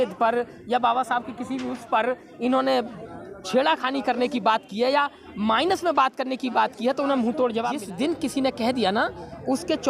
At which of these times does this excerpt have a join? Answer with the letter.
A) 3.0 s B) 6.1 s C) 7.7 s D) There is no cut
C